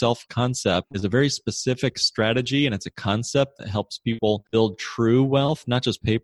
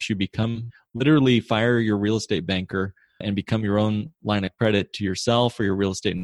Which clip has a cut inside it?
first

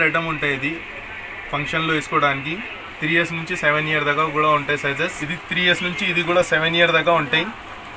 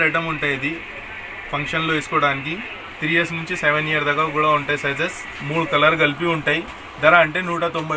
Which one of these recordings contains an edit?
first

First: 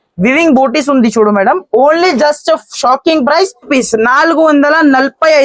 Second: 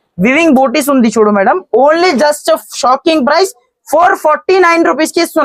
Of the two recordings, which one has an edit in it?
first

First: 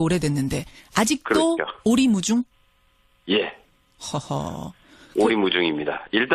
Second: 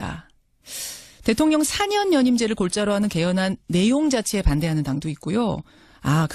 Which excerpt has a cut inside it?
first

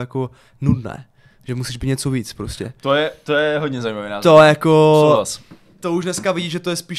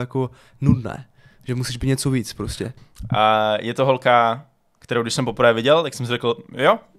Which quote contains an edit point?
second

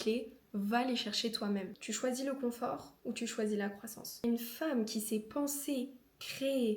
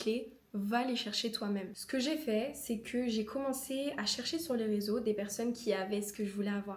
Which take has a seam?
first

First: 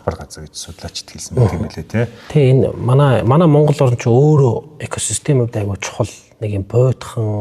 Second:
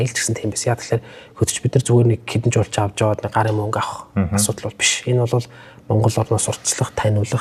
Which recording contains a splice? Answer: first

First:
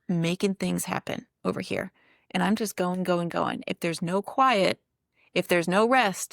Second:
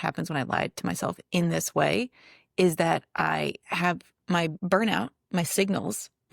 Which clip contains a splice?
second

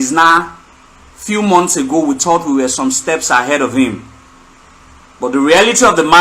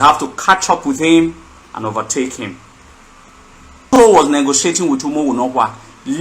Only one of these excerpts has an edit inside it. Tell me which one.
second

